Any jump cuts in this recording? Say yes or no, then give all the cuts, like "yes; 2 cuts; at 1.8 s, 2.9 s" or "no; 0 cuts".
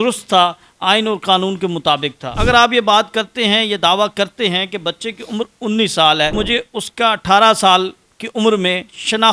yes; 2 cuts; at 2.3 s, 6.3 s